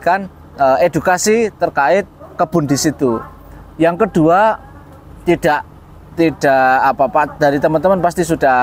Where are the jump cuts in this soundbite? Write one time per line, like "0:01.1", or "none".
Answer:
none